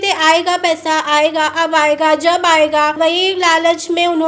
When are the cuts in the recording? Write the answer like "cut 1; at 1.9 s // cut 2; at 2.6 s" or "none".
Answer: cut 1; at 3.0 s